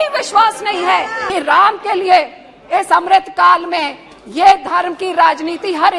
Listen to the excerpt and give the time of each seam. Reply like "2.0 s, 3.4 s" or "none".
1.3 s